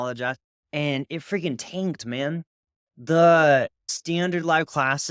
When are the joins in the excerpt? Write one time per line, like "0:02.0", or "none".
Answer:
0:03.8

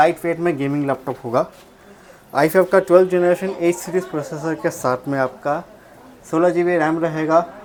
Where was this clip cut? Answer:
none

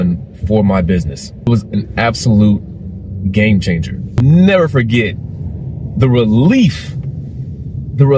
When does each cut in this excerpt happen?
0:01.5
0:04.2

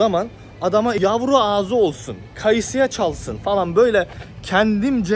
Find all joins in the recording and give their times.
0:01.0

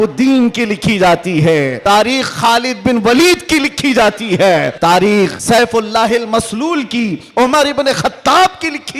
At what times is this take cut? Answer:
0:01.8
0:04.7
0:05.4

